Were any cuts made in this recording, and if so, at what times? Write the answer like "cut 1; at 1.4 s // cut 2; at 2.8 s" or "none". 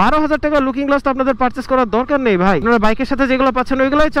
cut 1; at 2.6 s

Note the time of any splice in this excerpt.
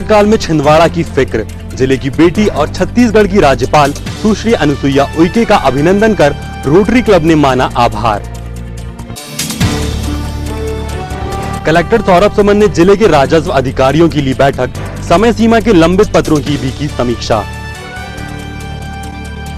none

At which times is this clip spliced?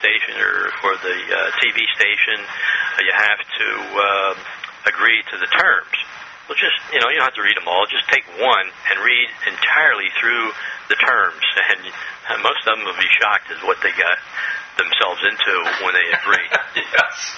cut 1; at 7.7 s

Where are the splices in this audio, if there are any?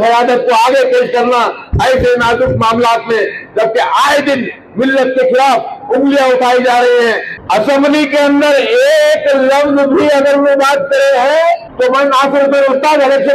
cut 1; at 7.3 s // cut 2; at 11.7 s

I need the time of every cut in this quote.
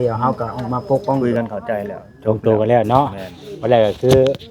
cut 1; at 1.2 s

